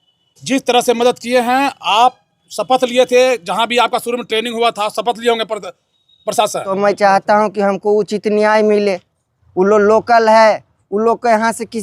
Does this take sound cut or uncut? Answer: cut